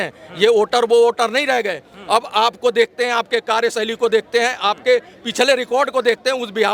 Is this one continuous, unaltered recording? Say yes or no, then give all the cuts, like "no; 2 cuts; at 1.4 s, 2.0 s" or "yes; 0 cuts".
yes; 0 cuts